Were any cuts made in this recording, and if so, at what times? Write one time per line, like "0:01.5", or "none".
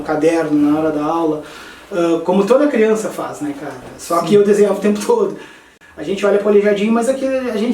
0:05.8